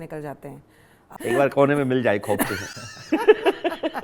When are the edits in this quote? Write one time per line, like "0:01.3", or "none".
0:01.0